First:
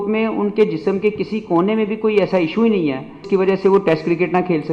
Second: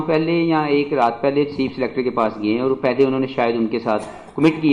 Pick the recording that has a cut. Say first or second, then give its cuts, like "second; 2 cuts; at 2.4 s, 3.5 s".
first; 1 cut; at 3.2 s